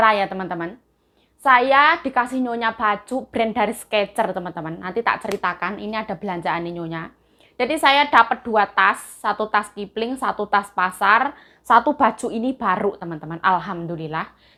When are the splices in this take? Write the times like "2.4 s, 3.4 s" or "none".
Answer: none